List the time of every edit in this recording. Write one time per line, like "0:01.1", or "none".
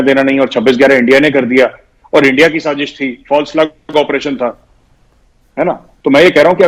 none